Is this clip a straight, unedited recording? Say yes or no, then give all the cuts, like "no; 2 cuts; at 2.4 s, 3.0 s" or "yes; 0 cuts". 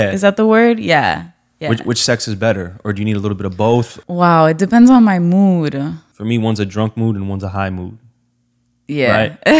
no; 2 cuts; at 4.0 s, 6.1 s